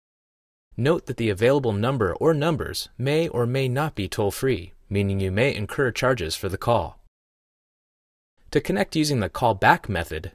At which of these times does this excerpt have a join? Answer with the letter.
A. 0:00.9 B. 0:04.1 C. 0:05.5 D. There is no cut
B